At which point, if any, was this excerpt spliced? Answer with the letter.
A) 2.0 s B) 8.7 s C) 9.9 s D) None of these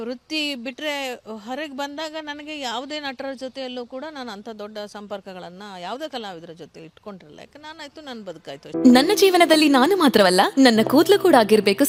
D